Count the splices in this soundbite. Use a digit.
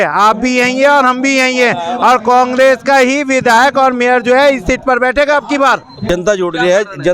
1